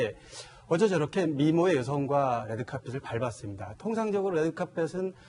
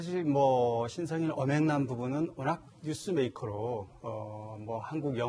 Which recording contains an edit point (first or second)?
second